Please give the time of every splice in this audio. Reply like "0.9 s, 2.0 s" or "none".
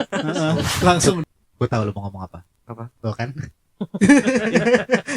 1.2 s

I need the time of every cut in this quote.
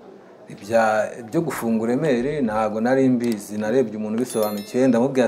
none

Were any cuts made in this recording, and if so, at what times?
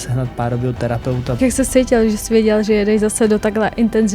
1.4 s

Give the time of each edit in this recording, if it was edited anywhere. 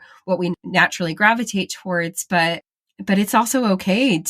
none

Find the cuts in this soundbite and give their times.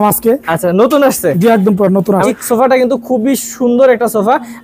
2.3 s

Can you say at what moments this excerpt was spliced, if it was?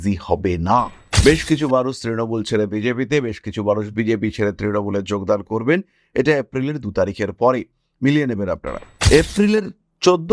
1.0 s

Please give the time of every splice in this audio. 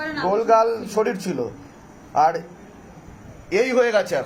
none

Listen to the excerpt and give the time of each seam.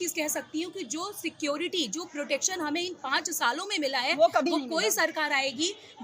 none

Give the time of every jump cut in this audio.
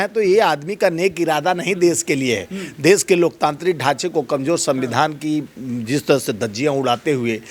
none

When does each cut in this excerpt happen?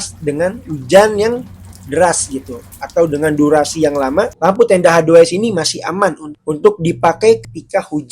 4.3 s

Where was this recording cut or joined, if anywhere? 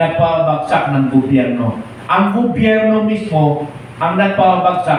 none

